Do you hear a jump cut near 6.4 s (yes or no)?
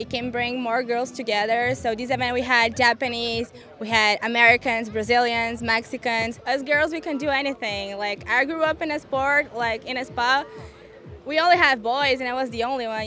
yes